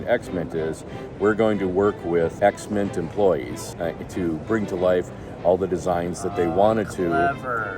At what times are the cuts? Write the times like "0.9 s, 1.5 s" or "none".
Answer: 2.3 s, 3.6 s